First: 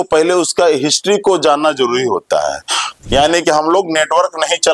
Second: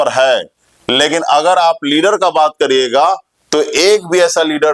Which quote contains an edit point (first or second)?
first